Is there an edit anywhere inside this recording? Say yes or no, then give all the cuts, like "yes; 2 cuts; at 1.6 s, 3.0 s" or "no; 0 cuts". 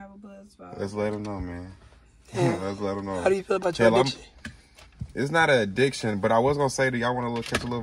no; 0 cuts